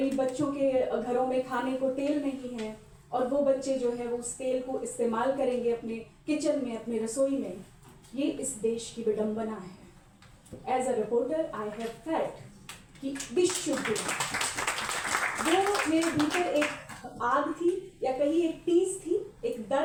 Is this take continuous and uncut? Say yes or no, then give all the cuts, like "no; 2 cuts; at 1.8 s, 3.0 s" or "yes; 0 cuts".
yes; 0 cuts